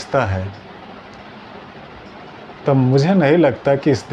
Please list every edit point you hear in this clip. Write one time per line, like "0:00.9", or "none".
none